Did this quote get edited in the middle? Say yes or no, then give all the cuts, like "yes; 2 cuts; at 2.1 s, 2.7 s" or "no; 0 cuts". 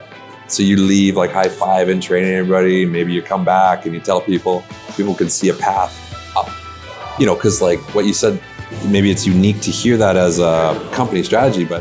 no; 0 cuts